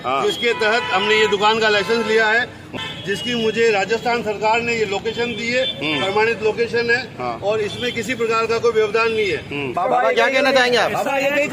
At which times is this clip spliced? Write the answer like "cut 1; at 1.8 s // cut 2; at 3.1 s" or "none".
cut 1; at 2.8 s // cut 2; at 9.7 s